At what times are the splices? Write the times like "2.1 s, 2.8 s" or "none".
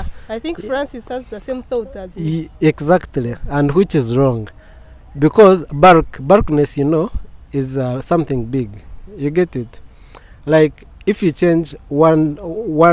none